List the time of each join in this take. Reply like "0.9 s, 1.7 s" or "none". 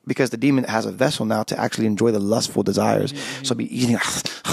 none